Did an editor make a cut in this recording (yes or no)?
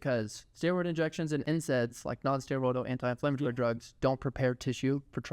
yes